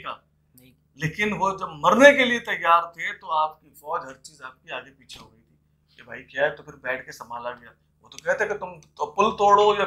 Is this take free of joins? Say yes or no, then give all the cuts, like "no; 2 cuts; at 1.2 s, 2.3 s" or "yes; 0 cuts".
yes; 0 cuts